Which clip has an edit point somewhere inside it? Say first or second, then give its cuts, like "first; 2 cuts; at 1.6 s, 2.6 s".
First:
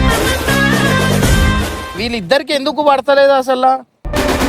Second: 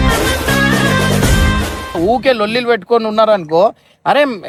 first; 1 cut; at 1.9 s